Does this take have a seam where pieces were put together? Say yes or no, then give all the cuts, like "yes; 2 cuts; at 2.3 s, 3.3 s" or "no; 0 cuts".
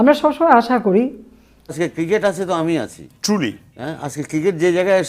yes; 1 cut; at 2.0 s